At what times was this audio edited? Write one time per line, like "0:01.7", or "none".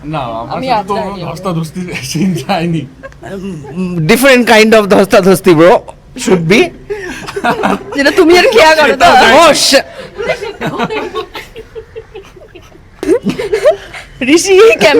0:13.1